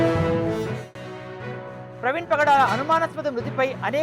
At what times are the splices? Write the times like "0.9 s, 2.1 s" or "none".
1.8 s